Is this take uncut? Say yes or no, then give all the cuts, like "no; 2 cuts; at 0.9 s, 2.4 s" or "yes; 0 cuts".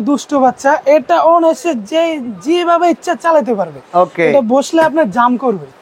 no; 1 cut; at 3.8 s